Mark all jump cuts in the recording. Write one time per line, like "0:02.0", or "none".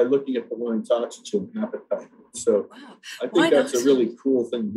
none